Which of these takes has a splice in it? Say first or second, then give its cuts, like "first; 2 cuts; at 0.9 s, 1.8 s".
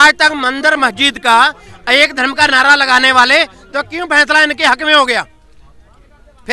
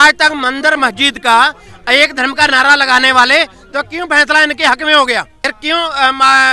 second; 1 cut; at 5.3 s